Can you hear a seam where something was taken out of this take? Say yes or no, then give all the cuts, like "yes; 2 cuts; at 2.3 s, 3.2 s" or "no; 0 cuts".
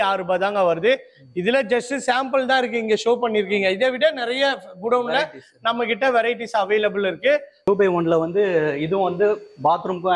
yes; 1 cut; at 7.5 s